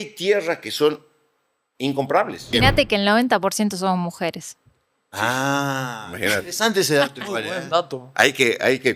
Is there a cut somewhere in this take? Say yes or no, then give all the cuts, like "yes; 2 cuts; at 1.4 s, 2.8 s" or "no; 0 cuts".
yes; 1 cut; at 2.5 s